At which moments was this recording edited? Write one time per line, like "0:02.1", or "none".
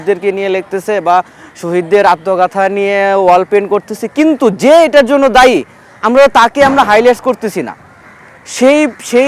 none